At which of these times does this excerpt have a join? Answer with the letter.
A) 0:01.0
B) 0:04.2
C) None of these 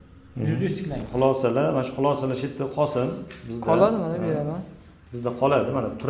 A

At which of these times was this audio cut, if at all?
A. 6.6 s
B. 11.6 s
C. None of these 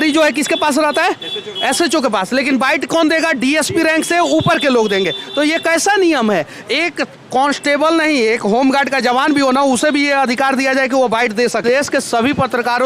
B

